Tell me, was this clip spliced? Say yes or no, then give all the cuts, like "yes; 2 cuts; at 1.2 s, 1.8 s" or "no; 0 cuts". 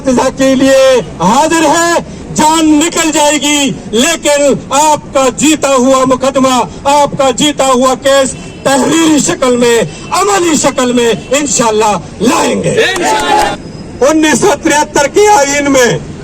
yes; 1 cut; at 13.5 s